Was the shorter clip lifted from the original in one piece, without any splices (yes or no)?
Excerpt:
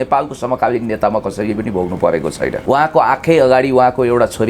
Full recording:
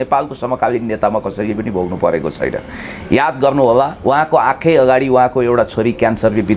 no